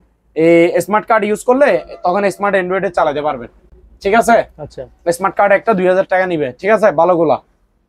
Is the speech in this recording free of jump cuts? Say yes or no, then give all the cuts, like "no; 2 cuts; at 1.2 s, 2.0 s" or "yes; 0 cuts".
yes; 0 cuts